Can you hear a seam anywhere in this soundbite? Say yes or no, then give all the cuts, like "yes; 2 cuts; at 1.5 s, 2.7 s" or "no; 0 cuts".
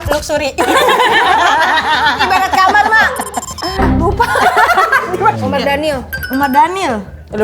yes; 1 cut; at 5.4 s